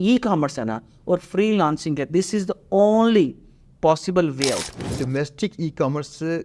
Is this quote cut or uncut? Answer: cut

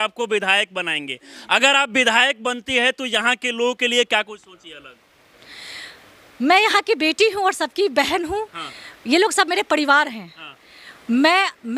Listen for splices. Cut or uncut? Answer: uncut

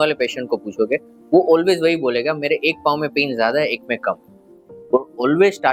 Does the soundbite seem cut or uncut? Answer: uncut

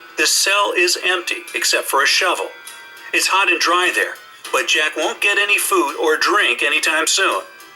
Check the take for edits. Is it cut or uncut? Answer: cut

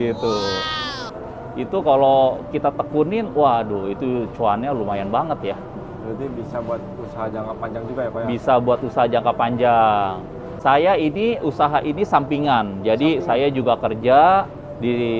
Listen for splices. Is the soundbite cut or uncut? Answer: cut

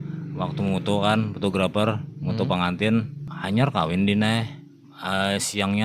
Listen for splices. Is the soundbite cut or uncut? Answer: cut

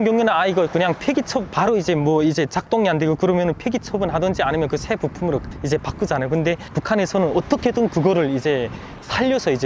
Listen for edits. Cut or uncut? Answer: uncut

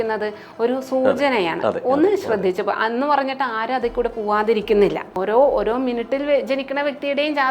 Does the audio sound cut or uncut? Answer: cut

